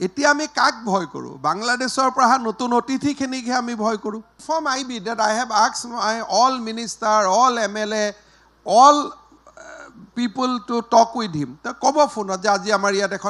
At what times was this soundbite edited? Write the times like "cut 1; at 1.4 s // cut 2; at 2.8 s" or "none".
cut 1; at 4.4 s